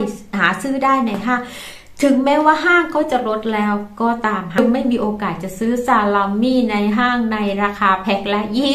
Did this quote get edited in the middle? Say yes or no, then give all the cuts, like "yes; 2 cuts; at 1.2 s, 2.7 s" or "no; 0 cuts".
yes; 1 cut; at 4.6 s